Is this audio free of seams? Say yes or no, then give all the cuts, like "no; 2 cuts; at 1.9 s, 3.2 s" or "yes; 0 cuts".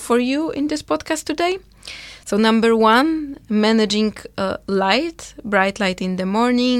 yes; 0 cuts